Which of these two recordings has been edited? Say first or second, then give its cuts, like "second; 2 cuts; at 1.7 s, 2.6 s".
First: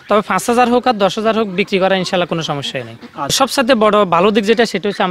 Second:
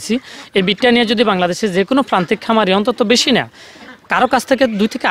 first; 1 cut; at 3.3 s